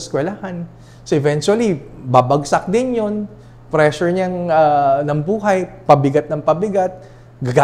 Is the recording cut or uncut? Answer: uncut